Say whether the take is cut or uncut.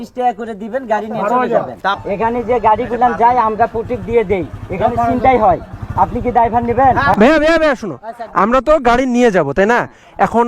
cut